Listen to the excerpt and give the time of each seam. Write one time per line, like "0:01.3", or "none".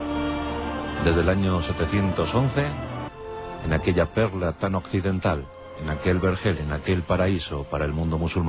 none